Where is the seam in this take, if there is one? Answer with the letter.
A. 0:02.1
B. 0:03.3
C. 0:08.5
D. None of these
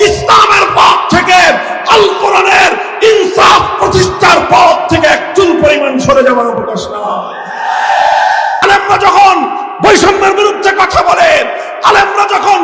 C